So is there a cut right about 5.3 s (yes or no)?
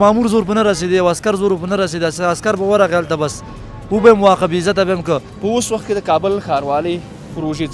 yes